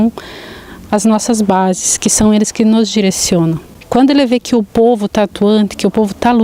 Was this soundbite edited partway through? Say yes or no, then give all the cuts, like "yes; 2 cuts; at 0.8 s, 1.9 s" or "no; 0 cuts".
no; 0 cuts